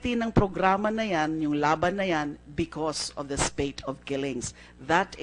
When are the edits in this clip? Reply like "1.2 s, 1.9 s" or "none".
2.7 s